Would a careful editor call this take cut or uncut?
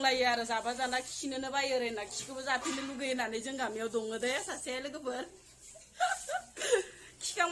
uncut